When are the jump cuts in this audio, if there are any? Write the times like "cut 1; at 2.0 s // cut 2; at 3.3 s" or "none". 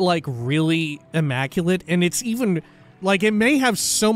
cut 1; at 1.0 s // cut 2; at 3.0 s